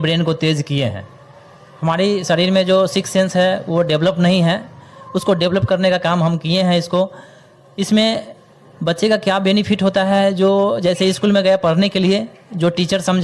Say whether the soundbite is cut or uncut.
uncut